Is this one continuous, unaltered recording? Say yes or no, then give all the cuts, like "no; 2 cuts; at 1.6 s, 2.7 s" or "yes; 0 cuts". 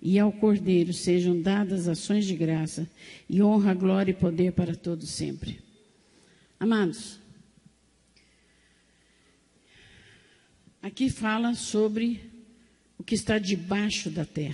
yes; 0 cuts